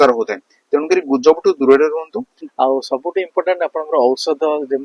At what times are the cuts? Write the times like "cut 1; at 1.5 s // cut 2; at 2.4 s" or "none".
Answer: cut 1; at 2.1 s